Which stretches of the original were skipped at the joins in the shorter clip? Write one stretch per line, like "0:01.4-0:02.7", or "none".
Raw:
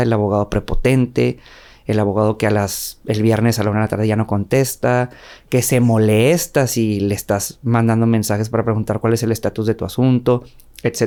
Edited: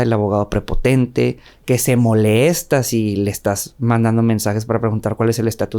0:01.5-0:05.3